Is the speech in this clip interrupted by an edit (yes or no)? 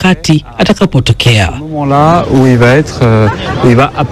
yes